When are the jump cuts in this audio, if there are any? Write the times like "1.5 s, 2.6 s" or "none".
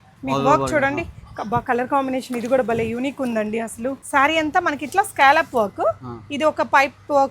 4.0 s